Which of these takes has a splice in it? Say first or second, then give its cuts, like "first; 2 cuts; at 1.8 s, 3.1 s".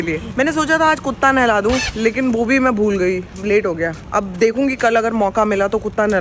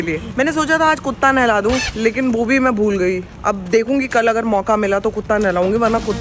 second; 1 cut; at 3.3 s